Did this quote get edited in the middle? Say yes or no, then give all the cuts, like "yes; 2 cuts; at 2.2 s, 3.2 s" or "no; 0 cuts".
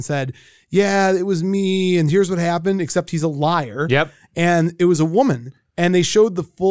no; 0 cuts